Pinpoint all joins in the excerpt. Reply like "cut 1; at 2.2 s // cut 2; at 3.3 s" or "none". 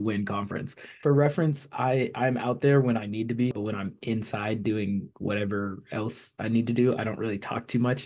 cut 1; at 0.9 s // cut 2; at 3.6 s